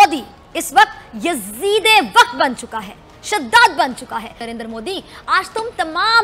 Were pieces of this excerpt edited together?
yes; 1 cut; at 4.3 s

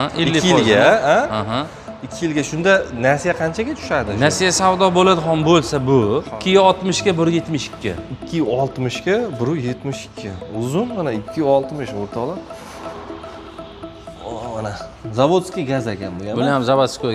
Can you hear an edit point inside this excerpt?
yes; 1 cut; at 6.3 s

